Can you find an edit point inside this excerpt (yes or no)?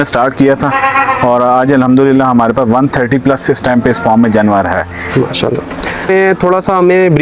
no